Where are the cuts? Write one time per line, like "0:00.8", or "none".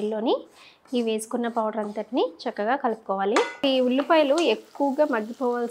0:03.5